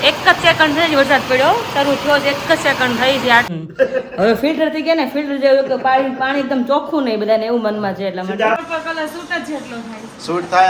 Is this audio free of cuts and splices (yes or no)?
no